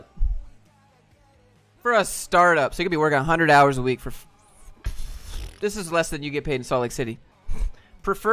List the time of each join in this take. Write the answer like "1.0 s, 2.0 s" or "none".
7.2 s